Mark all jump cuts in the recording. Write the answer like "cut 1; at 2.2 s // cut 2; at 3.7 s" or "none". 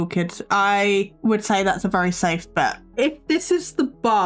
cut 1; at 1.1 s // cut 2; at 2.8 s